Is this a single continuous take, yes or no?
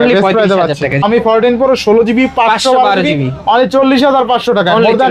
no